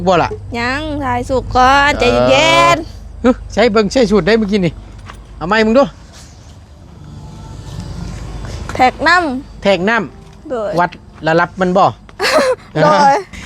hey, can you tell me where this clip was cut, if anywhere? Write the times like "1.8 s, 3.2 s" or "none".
none